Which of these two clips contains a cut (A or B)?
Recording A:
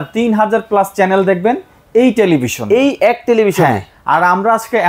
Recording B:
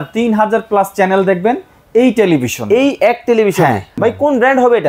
B